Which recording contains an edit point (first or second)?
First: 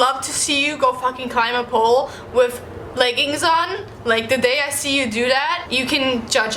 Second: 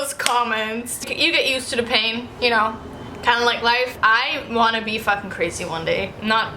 second